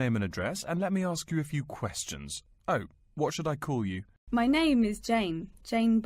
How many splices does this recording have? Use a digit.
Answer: 1